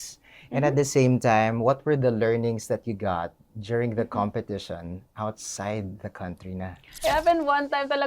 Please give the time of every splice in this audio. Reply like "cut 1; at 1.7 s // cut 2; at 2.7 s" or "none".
cut 1; at 6.8 s